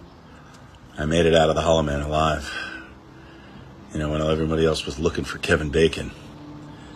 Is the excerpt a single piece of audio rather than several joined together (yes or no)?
yes